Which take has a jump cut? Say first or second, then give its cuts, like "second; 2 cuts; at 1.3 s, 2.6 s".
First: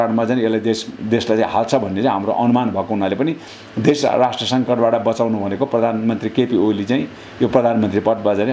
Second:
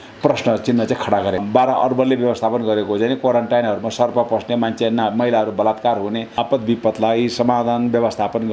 second; 2 cuts; at 1.4 s, 6.3 s